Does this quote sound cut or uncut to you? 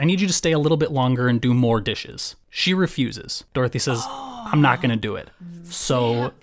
uncut